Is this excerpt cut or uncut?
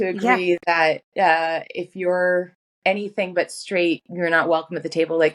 uncut